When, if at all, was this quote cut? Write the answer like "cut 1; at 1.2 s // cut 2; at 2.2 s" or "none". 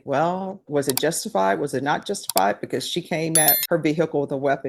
cut 1; at 3.6 s